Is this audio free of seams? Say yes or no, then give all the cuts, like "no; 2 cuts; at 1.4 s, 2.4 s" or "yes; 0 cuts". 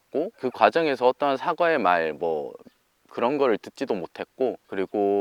yes; 0 cuts